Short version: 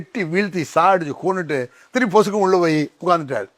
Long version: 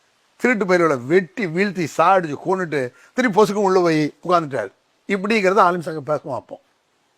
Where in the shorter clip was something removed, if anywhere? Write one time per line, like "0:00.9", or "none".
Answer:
none